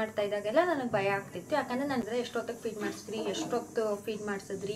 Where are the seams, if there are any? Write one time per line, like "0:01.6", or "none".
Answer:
0:02.0